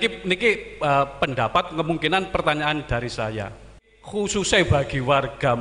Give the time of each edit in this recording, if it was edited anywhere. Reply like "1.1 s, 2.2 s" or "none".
3.9 s